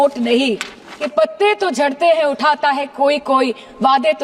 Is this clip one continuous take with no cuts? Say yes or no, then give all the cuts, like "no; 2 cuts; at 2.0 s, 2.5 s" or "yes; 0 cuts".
no; 1 cut; at 1.1 s